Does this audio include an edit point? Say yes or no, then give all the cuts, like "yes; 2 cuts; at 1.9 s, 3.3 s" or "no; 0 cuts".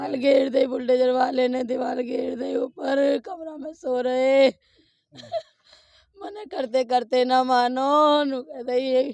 no; 0 cuts